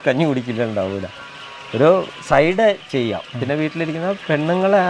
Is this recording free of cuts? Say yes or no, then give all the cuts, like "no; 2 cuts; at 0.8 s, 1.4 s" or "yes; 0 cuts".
yes; 0 cuts